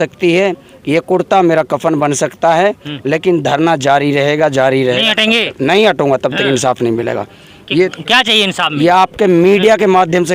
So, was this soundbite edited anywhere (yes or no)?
no